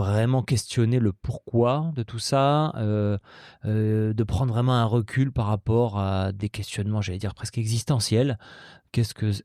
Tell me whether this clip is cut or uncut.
uncut